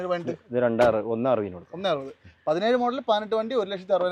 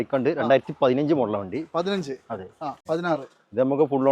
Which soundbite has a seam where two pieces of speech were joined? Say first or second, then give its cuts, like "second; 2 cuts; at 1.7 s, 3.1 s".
second; 1 cut; at 2.8 s